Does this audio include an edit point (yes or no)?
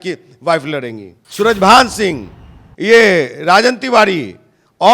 yes